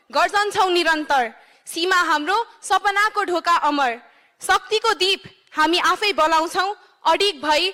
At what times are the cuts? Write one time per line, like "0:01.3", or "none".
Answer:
none